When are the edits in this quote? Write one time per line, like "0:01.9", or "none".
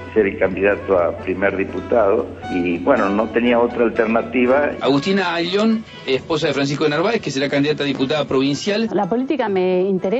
0:02.4
0:04.8
0:08.9